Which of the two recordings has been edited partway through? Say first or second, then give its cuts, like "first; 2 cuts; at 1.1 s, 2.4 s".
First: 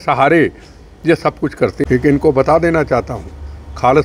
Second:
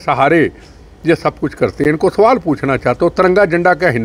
first; 1 cut; at 1.8 s